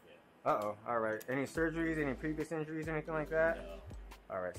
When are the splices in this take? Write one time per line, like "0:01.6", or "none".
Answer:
none